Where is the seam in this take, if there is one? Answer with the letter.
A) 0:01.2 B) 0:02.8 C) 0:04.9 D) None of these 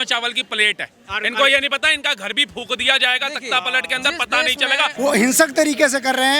C